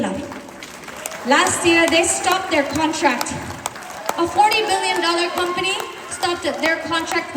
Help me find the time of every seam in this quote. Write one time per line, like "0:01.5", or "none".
none